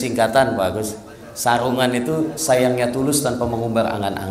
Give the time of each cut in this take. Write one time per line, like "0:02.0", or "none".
none